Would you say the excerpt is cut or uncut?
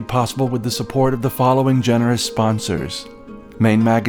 uncut